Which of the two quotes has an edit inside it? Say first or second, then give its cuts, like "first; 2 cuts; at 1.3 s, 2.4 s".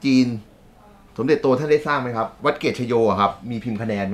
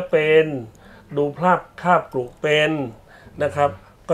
first; 1 cut; at 2.3 s